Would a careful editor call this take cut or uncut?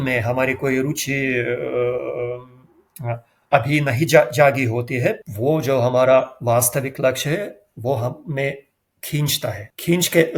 uncut